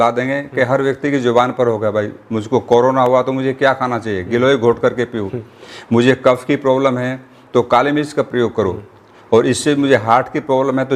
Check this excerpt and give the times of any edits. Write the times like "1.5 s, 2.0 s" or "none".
none